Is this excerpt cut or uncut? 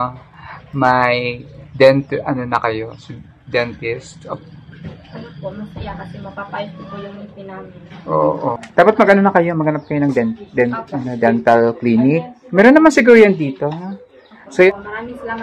cut